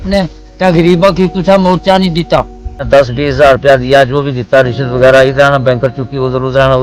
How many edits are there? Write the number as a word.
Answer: one